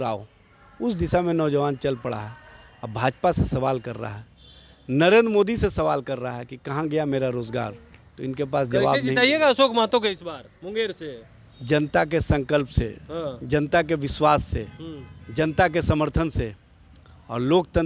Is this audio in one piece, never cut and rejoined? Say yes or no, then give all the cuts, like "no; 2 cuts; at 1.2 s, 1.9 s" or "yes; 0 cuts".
yes; 0 cuts